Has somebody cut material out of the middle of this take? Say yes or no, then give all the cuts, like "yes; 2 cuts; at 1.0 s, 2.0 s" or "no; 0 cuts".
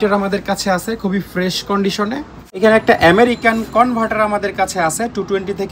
yes; 1 cut; at 2.6 s